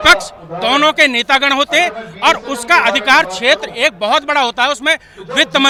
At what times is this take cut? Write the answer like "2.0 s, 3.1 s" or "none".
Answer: none